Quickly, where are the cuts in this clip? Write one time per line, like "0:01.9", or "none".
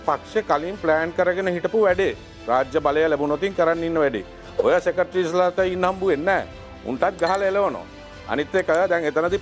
none